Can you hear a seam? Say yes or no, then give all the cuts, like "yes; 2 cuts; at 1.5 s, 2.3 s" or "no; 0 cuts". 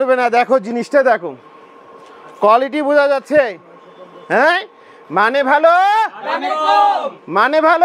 no; 0 cuts